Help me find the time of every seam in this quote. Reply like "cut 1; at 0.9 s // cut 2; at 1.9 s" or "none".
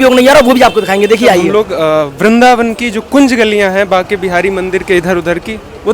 cut 1; at 1.5 s